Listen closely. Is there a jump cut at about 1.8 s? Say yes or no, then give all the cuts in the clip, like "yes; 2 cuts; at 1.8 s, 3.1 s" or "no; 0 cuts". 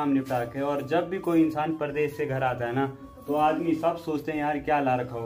no; 0 cuts